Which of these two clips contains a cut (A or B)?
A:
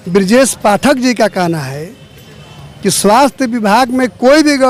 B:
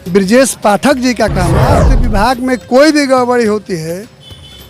B